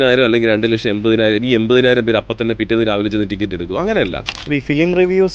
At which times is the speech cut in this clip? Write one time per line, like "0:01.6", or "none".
0:04.4